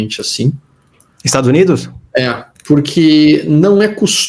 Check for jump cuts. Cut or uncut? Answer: cut